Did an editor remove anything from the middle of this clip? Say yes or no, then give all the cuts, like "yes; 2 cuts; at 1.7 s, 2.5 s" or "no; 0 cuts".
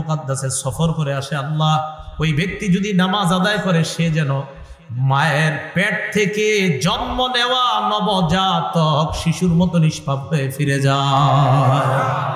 no; 0 cuts